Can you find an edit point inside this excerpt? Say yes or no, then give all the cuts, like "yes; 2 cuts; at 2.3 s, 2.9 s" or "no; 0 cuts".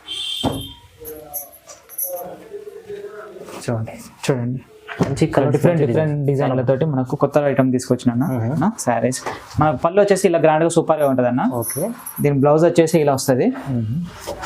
yes; 1 cut; at 8.6 s